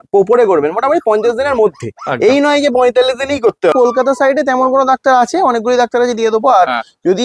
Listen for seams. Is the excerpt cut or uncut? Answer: cut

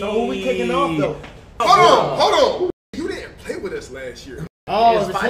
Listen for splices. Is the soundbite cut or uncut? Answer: cut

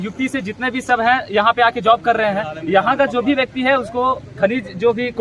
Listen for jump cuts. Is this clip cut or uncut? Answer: uncut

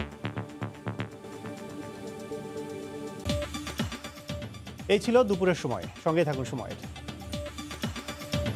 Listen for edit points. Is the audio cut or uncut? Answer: uncut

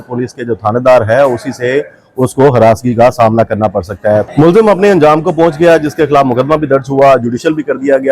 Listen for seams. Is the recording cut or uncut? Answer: cut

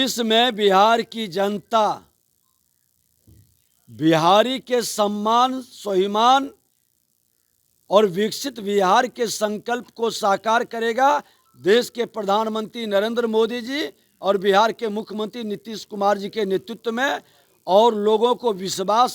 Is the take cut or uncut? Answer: uncut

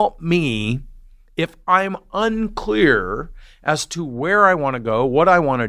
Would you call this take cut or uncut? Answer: uncut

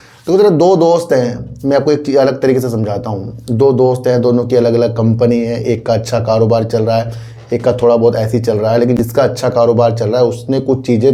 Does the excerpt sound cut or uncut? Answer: uncut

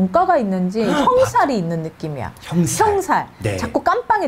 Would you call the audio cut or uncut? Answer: uncut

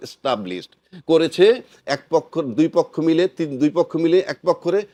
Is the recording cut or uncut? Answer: uncut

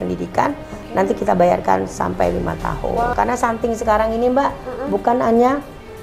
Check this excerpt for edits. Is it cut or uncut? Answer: cut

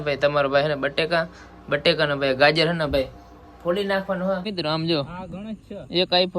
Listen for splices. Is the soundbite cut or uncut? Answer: cut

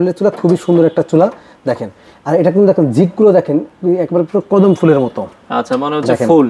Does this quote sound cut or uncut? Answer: uncut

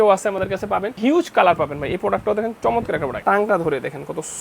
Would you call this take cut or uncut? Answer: cut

